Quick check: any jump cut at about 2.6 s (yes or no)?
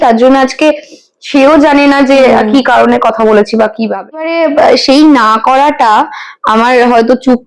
no